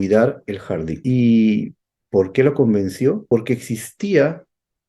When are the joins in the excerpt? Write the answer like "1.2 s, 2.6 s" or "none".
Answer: 0.9 s, 3.2 s